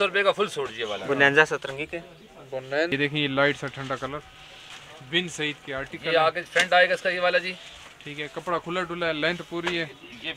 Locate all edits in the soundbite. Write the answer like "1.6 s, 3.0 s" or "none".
2.9 s